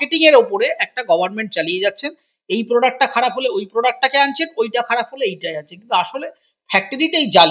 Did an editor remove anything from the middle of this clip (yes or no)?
no